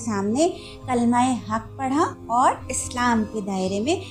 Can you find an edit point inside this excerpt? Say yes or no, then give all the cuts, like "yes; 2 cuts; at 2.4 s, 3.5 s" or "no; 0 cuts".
no; 0 cuts